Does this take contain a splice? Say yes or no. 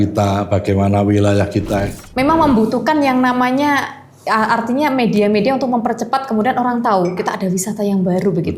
yes